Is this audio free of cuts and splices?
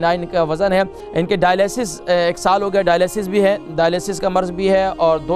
no; 1 cut; at 1.0 s

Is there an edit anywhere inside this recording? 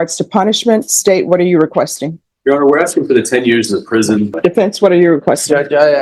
yes; 1 cut; at 4.3 s

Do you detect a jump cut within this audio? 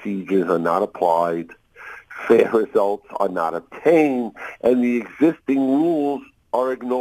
no; 0 cuts

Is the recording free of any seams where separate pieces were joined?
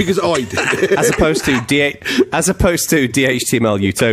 yes; 0 cuts

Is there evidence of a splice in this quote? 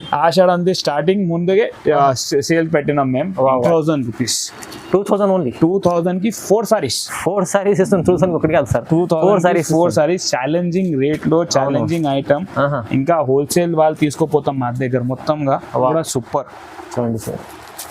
yes; 2 cuts; at 3.7 s, 15.9 s

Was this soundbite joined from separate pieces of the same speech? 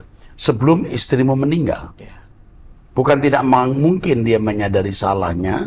no; 0 cuts

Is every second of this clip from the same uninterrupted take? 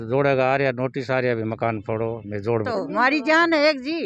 no; 1 cut; at 2.7 s

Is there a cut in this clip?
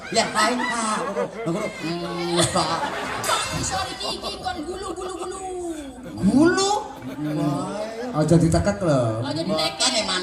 yes; 1 cut; at 3.5 s

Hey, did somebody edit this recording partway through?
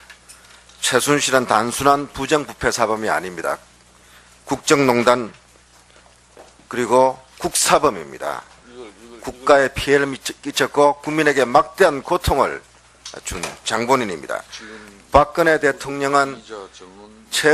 no; 0 cuts

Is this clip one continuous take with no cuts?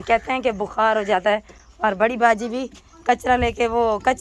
yes; 0 cuts

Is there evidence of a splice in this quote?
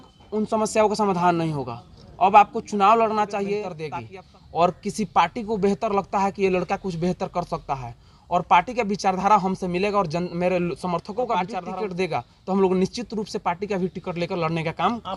yes; 2 cuts; at 3.8 s, 11.6 s

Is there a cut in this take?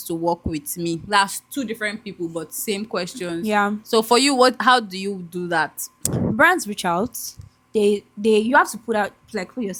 no; 0 cuts

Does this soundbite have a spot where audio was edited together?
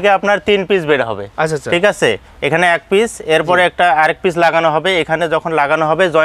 no; 0 cuts

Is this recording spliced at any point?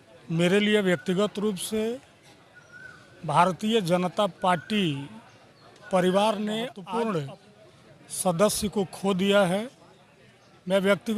yes; 1 cut; at 6.8 s

